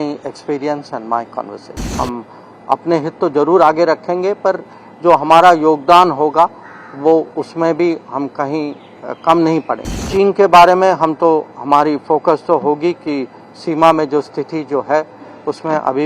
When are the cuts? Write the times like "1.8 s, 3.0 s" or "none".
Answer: 1.9 s, 10.0 s